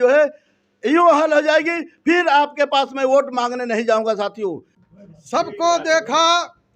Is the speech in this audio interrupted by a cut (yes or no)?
yes